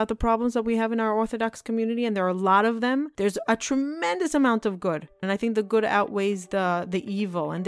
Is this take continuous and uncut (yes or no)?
no